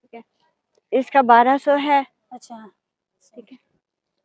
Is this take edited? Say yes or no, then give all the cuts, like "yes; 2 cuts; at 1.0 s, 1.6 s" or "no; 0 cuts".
no; 0 cuts